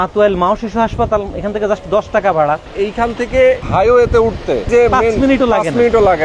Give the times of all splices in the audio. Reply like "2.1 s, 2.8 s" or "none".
2.7 s, 3.6 s, 4.7 s